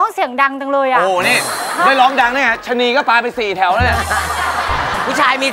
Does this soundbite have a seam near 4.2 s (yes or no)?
no